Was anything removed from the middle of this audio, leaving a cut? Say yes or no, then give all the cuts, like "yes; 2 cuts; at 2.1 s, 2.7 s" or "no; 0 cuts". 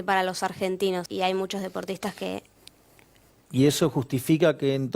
yes; 1 cut; at 1.1 s